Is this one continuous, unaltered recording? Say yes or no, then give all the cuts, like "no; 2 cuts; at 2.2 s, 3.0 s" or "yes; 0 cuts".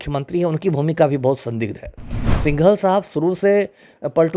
yes; 0 cuts